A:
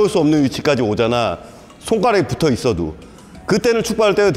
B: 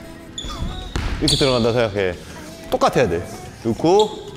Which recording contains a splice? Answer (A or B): B